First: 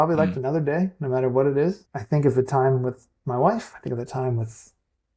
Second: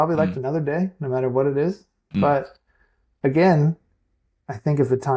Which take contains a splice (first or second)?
first